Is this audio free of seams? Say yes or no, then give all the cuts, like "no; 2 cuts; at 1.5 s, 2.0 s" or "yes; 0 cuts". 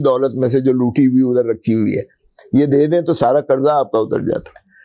yes; 0 cuts